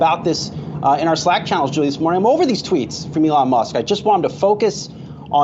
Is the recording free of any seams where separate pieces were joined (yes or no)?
yes